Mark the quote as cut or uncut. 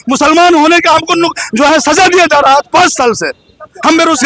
uncut